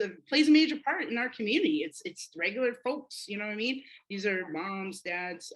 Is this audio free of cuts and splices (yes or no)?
yes